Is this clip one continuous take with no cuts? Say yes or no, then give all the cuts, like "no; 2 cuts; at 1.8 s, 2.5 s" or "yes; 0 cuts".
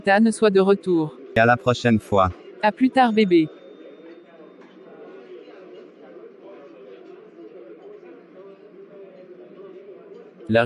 no; 1 cut; at 1.4 s